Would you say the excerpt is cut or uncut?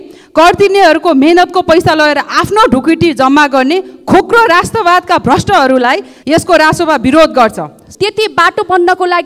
cut